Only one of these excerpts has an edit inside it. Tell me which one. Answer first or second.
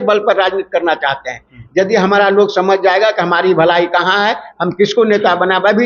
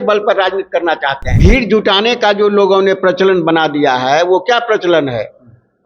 second